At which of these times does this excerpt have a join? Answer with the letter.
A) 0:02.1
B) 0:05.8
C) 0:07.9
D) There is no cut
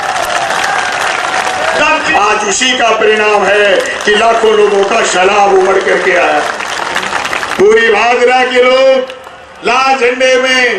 A